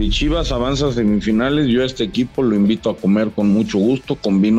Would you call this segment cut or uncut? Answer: uncut